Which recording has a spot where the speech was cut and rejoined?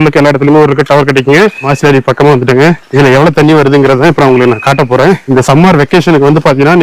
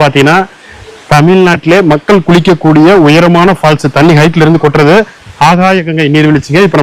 first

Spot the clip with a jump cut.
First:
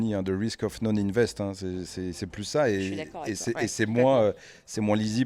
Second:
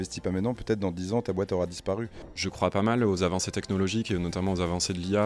second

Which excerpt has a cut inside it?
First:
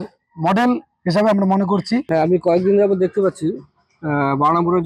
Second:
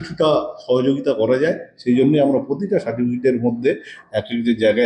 first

